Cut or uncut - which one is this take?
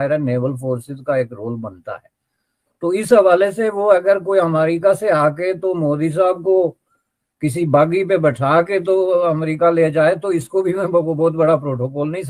uncut